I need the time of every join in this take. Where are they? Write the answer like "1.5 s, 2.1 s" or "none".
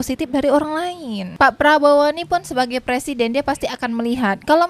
1.2 s

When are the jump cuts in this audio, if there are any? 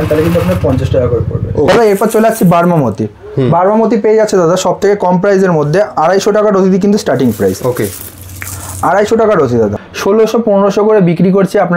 1.7 s, 9.7 s

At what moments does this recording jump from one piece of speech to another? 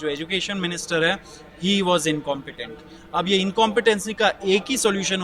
none

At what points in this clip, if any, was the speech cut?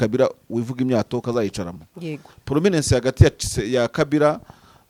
none

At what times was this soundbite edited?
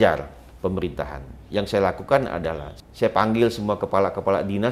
2.7 s

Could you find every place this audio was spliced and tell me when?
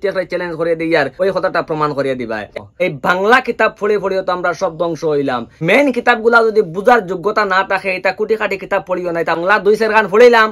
2.5 s, 9.4 s

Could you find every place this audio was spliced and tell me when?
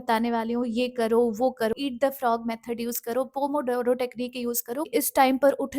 1.7 s, 4.8 s

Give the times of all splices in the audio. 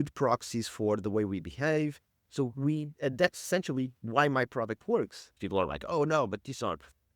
5.2 s

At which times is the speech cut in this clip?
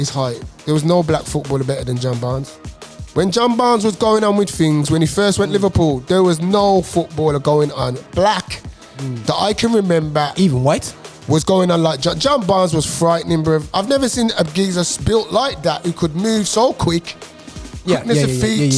none

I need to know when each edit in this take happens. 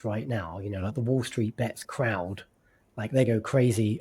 1.9 s

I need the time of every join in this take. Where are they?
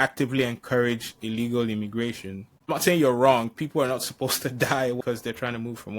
2.7 s, 5.0 s

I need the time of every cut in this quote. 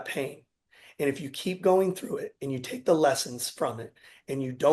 none

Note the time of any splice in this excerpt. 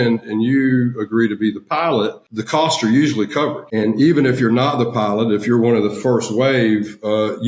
2.3 s, 3.6 s

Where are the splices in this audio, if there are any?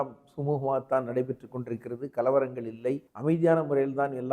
3.1 s

